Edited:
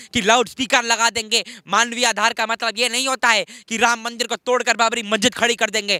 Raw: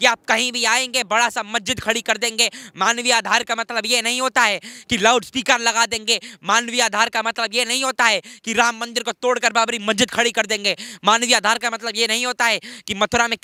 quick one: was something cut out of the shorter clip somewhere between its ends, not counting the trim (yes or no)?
no